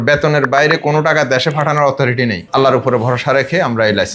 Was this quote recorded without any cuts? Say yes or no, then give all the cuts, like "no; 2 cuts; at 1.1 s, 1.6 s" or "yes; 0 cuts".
no; 1 cut; at 2.4 s